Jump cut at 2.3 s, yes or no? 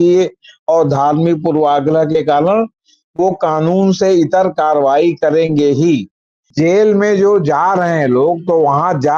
no